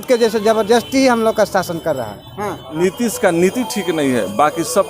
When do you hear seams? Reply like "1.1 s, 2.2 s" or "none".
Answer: 2.6 s